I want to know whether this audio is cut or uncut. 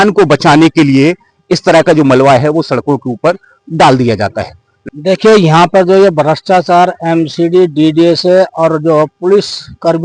cut